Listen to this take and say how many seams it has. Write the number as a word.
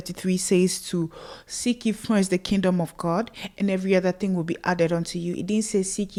zero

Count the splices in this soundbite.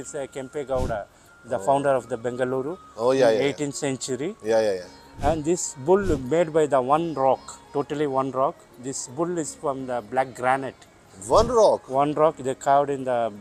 zero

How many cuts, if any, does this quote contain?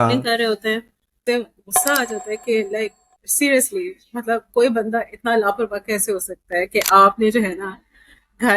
one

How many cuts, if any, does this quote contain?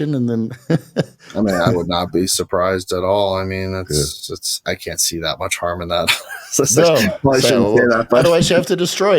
one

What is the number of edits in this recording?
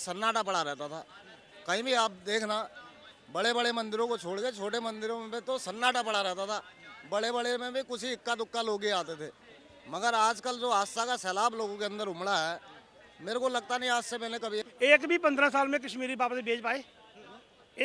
one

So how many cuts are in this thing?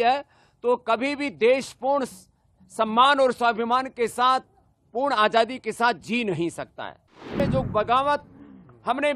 one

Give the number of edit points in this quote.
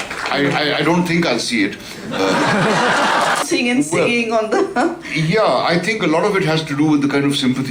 one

